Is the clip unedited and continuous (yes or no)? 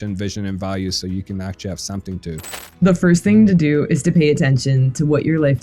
no